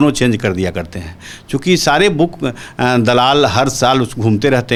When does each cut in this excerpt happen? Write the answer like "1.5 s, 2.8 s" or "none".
none